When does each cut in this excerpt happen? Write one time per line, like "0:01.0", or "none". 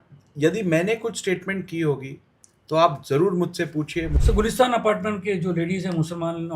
0:04.1